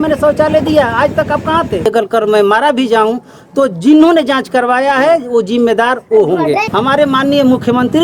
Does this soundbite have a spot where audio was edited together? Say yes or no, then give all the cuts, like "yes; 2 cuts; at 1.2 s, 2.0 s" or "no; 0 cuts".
yes; 2 cuts; at 1.9 s, 6.6 s